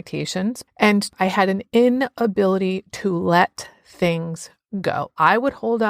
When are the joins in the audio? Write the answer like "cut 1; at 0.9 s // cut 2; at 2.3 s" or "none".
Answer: cut 1; at 1.1 s